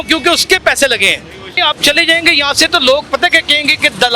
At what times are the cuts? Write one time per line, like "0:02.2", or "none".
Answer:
0:01.6